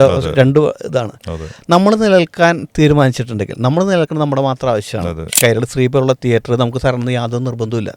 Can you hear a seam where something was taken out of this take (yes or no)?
yes